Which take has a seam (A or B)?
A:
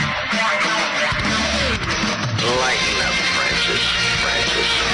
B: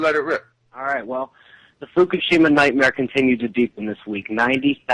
A